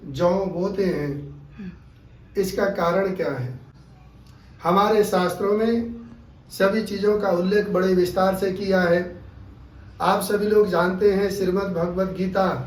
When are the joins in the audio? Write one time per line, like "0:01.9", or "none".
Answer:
none